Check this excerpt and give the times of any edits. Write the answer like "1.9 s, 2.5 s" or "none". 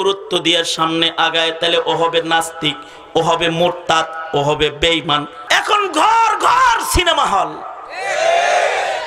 5.3 s